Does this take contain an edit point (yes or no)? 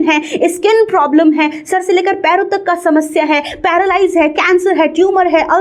no